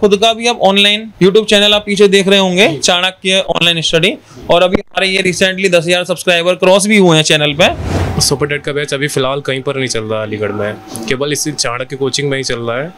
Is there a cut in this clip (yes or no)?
yes